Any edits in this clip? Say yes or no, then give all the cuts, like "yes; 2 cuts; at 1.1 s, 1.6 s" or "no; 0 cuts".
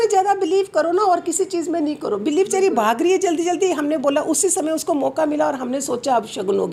no; 0 cuts